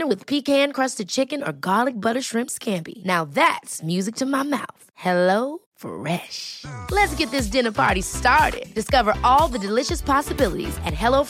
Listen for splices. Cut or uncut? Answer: uncut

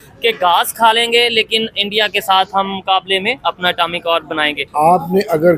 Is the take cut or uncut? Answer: cut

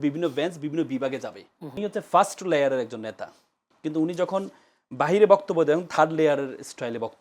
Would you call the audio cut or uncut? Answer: cut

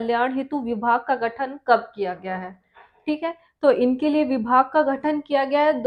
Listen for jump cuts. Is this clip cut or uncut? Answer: uncut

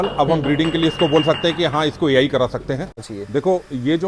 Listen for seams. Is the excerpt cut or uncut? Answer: cut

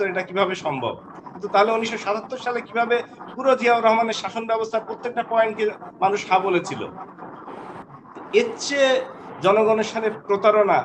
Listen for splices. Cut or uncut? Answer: cut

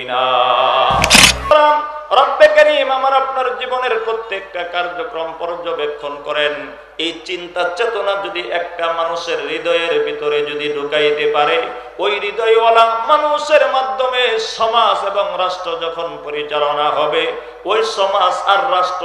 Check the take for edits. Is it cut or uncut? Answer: cut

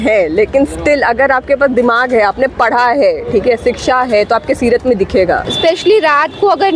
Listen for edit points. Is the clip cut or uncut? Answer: cut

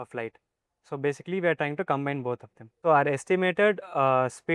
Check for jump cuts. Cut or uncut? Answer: cut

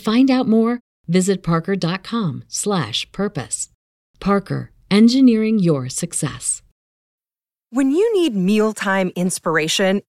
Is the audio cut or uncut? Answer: cut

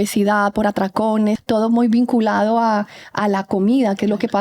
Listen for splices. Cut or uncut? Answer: cut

